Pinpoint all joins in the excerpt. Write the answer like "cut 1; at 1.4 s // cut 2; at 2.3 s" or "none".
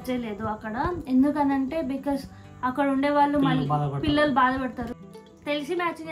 cut 1; at 4.9 s

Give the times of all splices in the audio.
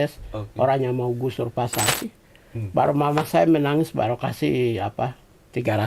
cut 1; at 1.9 s

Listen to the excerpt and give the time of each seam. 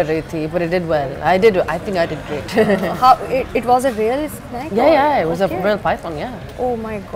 none

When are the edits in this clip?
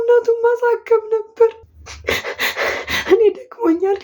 cut 1; at 1.7 s

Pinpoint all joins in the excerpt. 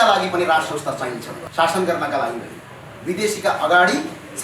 cut 1; at 1.3 s

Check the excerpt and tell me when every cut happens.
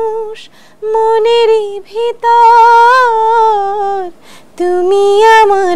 none

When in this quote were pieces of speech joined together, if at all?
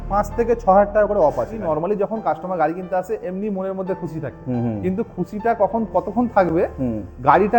cut 1; at 1.6 s

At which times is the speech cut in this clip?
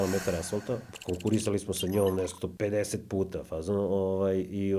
cut 1; at 0.9 s // cut 2; at 2.5 s

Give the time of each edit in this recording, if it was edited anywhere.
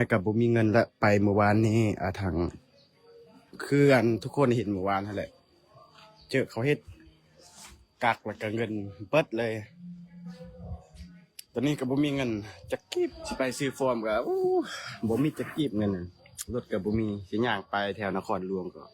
cut 1; at 13.2 s

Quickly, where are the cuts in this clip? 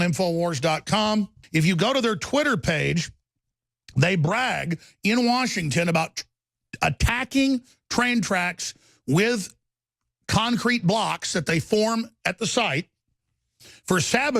cut 1; at 1.4 s

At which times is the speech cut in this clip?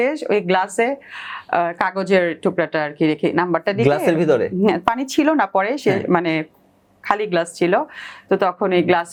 none

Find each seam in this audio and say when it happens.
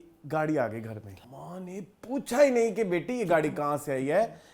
cut 1; at 1.1 s

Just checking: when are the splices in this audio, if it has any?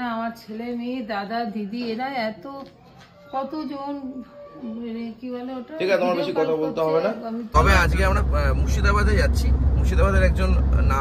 cut 1; at 7.4 s

